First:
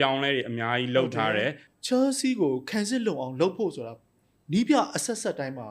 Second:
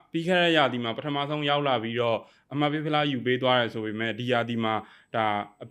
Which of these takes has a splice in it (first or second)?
first